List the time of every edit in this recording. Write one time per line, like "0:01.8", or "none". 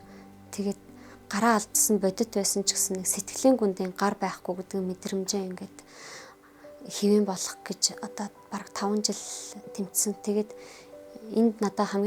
none